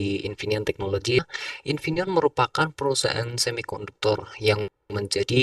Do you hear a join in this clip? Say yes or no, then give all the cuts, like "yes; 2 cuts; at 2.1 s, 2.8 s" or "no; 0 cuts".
yes; 1 cut; at 1.3 s